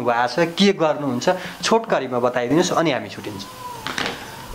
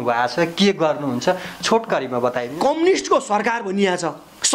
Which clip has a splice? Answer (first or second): second